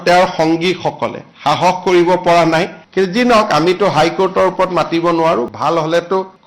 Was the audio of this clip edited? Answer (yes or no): yes